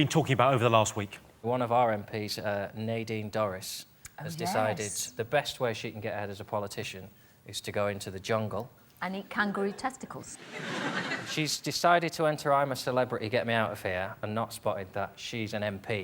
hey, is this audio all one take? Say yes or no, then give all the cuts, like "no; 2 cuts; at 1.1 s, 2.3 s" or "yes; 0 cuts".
no; 1 cut; at 1.4 s